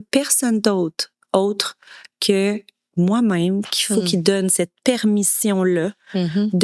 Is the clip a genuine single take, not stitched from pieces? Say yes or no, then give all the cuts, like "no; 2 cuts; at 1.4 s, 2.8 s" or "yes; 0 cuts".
yes; 0 cuts